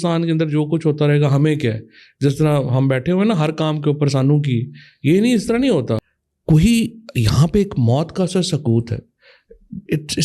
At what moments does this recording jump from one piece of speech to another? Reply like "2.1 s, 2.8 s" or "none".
6.0 s